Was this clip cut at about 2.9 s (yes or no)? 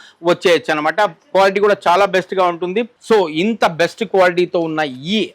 yes